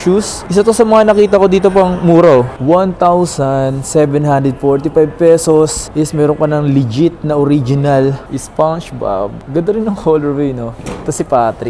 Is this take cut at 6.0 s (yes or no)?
no